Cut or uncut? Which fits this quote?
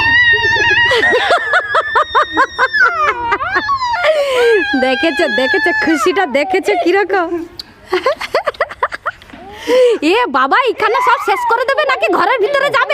uncut